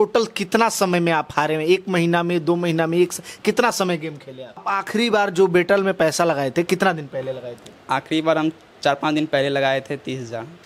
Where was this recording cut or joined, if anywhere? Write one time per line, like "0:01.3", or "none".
0:04.6